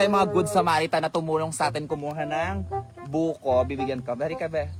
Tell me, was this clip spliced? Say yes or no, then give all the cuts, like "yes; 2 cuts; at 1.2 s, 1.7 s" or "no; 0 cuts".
no; 0 cuts